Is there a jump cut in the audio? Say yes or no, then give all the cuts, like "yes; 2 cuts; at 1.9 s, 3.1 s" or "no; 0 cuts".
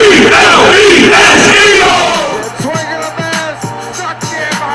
no; 0 cuts